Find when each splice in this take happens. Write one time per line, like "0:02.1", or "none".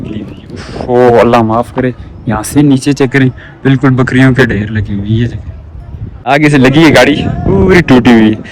0:06.3